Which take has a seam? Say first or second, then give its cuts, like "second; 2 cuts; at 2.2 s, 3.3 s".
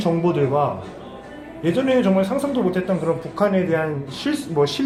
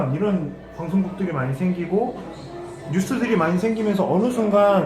second; 1 cut; at 1.0 s